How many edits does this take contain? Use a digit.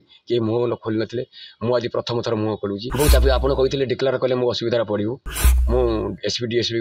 1